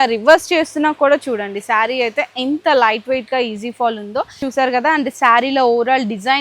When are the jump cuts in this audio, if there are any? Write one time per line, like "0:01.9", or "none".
0:04.4